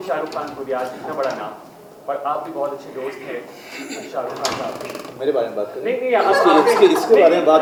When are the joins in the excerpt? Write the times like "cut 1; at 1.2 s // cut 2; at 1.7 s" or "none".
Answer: none